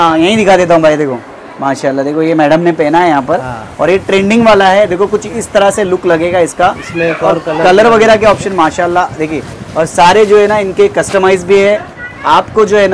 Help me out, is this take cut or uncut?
uncut